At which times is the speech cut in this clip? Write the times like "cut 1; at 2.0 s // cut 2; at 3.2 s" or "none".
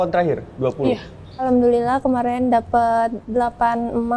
cut 1; at 1.5 s // cut 2; at 3.2 s